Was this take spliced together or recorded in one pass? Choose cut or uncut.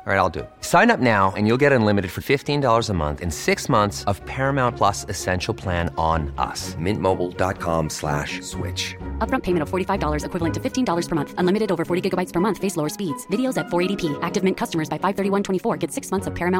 uncut